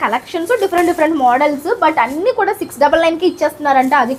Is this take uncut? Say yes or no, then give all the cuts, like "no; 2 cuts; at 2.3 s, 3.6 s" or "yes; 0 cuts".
yes; 0 cuts